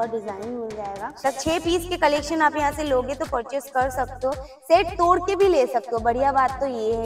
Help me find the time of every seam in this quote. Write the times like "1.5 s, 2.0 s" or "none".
1.1 s